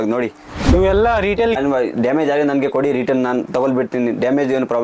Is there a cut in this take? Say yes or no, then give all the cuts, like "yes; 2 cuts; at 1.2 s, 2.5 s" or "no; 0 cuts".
yes; 1 cut; at 1.6 s